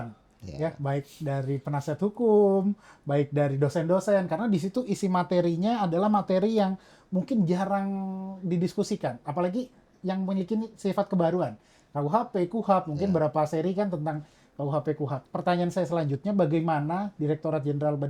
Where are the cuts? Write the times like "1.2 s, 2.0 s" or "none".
15.2 s